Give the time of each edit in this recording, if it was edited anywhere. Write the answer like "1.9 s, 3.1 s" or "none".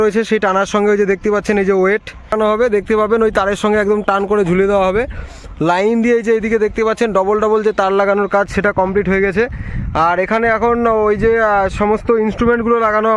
none